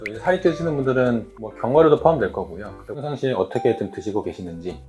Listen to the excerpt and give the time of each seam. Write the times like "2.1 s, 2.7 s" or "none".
2.8 s